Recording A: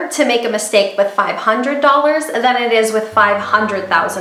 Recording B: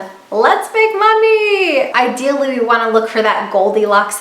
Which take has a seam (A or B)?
B